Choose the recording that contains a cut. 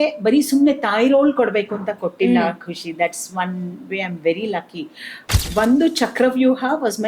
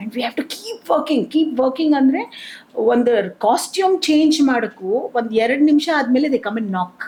first; 1 cut; at 5.3 s

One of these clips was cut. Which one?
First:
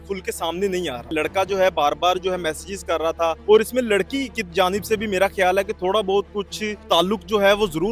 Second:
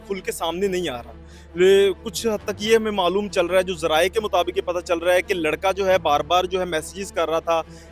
first; 3 cuts; at 1.1 s, 3.4 s, 6.8 s

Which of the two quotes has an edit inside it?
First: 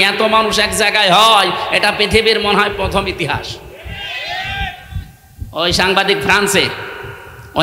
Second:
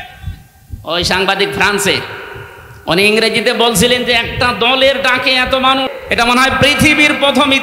second; 1 cut; at 5.9 s

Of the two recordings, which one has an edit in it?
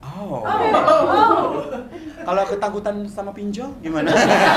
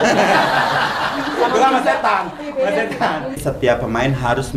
second; 1 cut; at 3.4 s

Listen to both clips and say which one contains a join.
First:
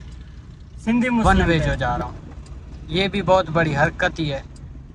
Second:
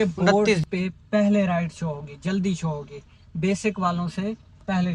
first; 1 cut; at 1.2 s

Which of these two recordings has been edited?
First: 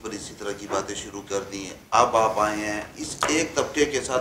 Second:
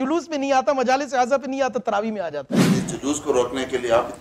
second; 1 cut; at 2.7 s

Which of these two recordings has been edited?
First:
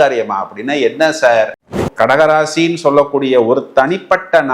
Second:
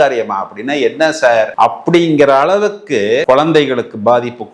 first; 1 cut; at 1.6 s

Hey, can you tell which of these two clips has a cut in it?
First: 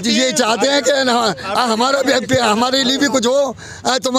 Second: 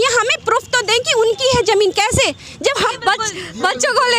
second; 1 cut; at 2.8 s

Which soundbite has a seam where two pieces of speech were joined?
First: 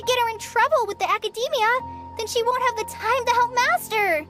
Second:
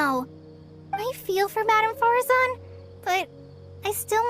second; 1 cut; at 1.0 s

